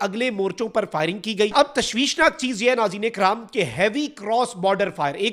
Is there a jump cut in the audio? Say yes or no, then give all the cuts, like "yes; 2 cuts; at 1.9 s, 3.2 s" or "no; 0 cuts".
yes; 1 cut; at 1.5 s